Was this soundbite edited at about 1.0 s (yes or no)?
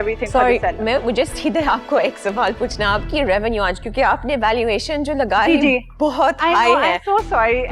yes